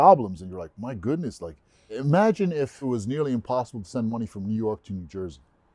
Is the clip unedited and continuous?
no; 2 cuts; at 1.9 s, 2.8 s

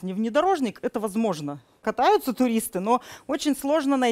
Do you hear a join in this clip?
yes; 1 cut; at 1.8 s

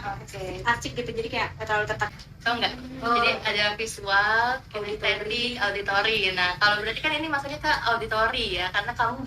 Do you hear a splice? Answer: yes; 1 cut; at 2.1 s

